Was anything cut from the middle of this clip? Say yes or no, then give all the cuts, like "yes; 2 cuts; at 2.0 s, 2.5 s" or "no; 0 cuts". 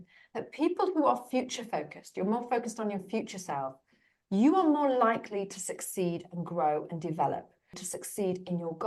yes; 1 cut; at 7.8 s